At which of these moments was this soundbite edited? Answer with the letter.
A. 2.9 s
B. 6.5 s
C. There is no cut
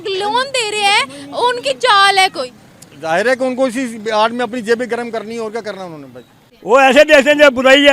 B